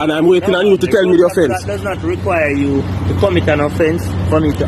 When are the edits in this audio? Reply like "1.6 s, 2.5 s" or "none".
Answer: none